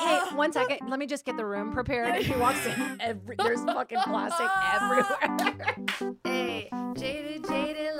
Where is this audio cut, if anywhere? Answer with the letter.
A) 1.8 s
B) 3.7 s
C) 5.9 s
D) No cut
C